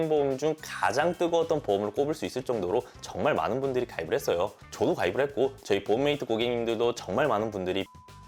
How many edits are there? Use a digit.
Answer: 0